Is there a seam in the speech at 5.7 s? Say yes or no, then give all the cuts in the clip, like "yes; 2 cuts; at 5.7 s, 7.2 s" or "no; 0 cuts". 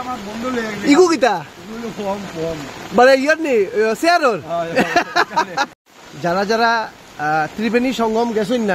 yes; 1 cut; at 5.7 s